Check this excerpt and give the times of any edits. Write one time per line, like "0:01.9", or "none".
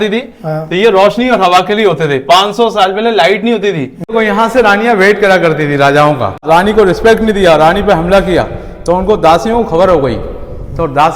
0:04.1
0:06.4